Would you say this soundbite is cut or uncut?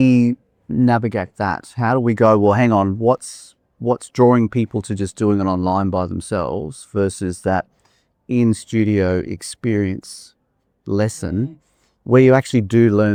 uncut